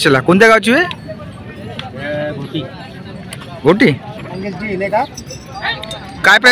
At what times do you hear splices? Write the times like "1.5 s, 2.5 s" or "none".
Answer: 4.4 s